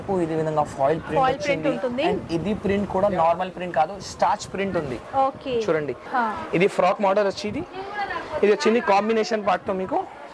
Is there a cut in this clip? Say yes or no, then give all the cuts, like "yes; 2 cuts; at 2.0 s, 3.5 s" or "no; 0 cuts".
yes; 1 cut; at 6.0 s